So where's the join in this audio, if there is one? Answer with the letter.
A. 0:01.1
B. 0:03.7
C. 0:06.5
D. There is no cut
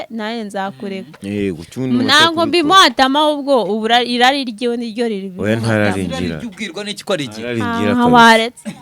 A